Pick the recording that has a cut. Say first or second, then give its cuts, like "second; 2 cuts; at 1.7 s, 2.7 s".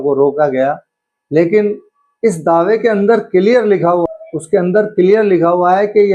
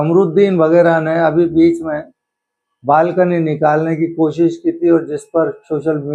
first; 1 cut; at 4.0 s